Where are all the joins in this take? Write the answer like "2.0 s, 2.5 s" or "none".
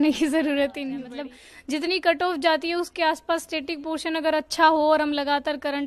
1.0 s